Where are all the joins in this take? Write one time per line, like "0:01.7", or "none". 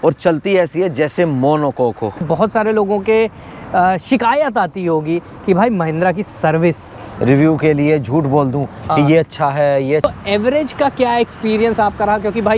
0:02.2
0:07.0
0:10.0